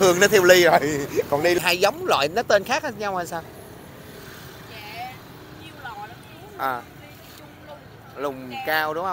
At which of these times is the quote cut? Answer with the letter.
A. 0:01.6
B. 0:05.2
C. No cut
A